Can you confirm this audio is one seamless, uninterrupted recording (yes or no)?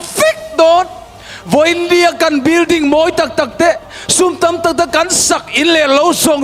yes